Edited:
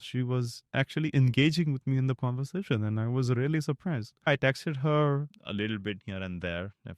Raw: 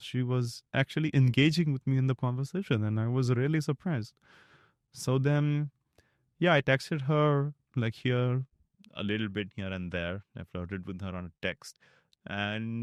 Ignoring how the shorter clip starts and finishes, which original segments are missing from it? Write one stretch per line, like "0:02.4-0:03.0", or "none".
0:04.3-0:06.5
0:07.6-0:08.9